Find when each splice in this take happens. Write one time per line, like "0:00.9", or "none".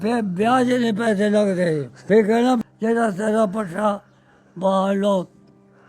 0:02.0
0:02.6